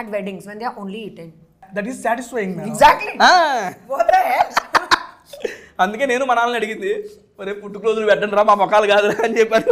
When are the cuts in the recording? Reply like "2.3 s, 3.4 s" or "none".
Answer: 1.7 s

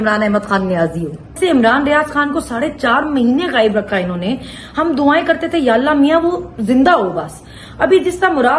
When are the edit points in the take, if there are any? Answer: 1.3 s

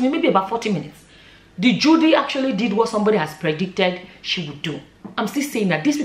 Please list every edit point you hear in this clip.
4.9 s

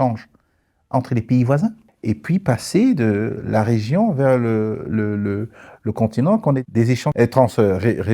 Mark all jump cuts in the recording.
1.9 s, 6.6 s

